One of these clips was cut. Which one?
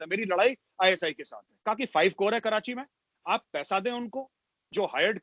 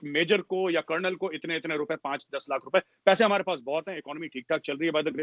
first; 1 cut; at 1.6 s

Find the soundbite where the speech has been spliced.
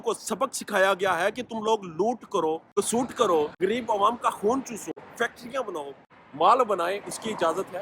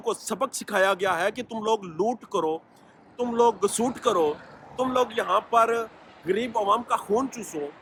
first; 4 cuts; at 2.7 s, 3.5 s, 5.0 s, 6.1 s

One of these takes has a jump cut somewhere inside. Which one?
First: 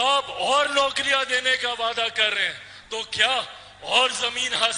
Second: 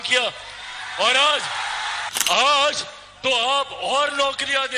second; 1 cut; at 2.1 s

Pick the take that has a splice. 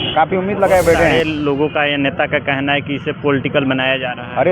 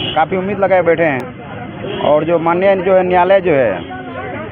first; 1 cut; at 1.1 s

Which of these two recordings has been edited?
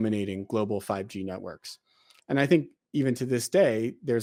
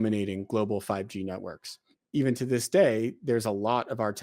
second; 1 cut; at 2.0 s

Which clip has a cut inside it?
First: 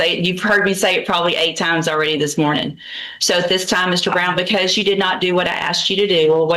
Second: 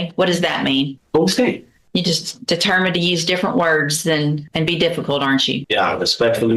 second; 4 cuts; at 1.0 s, 1.7 s, 4.4 s, 5.6 s

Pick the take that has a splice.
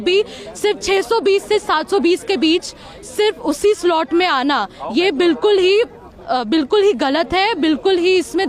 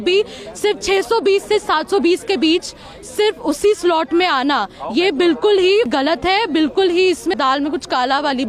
second; 2 cuts; at 5.9 s, 7.4 s

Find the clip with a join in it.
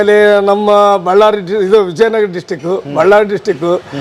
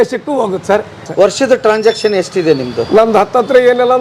second; 1 cut; at 1.0 s

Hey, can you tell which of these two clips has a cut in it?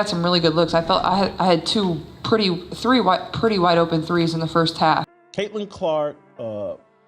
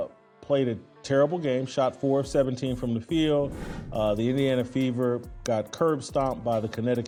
first; 1 cut; at 5.2 s

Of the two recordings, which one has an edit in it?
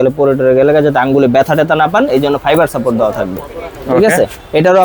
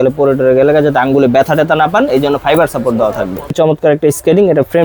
second; 1 cut; at 3.5 s

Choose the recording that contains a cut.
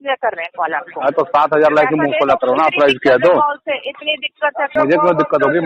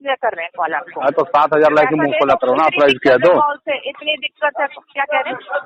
first; 1 cut; at 4.7 s

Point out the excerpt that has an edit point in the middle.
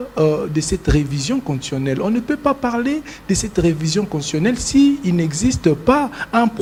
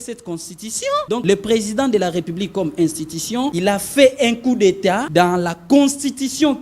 second; 3 cuts; at 1.2 s, 3.5 s, 5.1 s

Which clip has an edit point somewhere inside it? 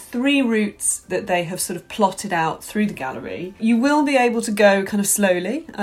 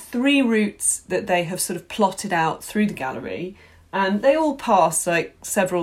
first; 1 cut; at 3.6 s

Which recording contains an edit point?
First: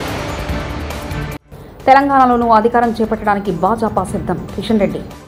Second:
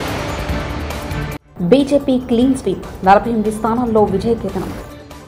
second; 1 cut; at 1.4 s

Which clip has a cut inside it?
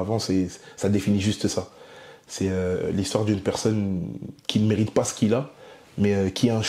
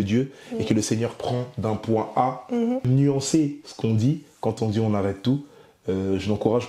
second; 1 cut; at 2.9 s

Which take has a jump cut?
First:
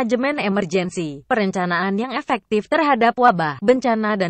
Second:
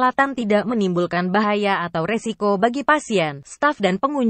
first; 2 cuts; at 1.2 s, 3.4 s

